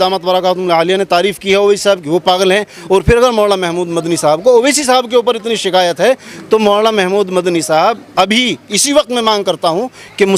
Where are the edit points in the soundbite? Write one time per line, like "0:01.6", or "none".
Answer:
none

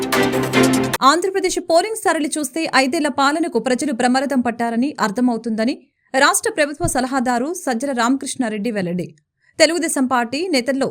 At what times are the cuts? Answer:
0:00.9

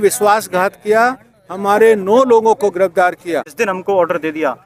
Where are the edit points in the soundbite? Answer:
0:03.5

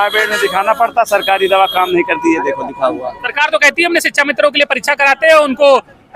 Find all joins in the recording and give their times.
0:03.2

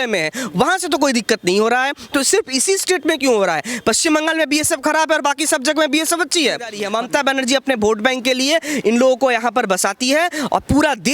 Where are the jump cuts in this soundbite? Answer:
0:06.8

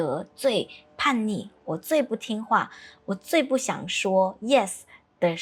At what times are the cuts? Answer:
none

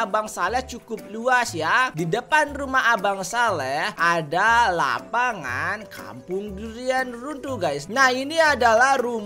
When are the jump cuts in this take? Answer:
0:07.9

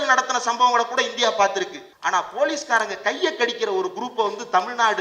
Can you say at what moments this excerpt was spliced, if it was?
0:01.8

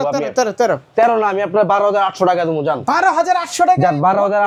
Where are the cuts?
none

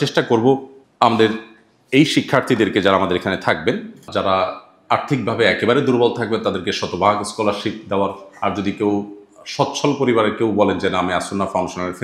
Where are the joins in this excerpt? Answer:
none

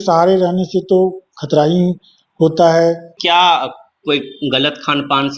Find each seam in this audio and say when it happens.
0:03.1

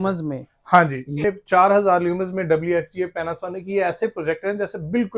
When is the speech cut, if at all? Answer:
0:01.2

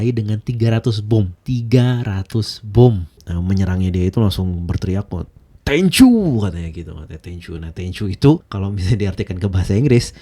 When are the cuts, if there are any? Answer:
0:03.2

